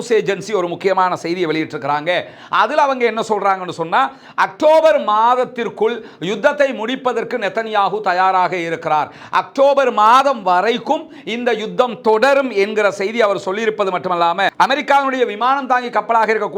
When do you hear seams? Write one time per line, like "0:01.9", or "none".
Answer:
0:14.5